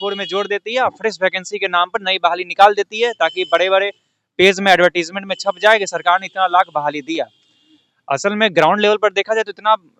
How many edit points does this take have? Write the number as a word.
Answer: zero